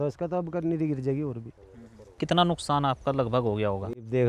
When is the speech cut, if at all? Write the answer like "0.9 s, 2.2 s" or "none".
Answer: none